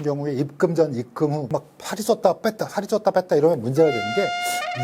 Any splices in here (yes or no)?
yes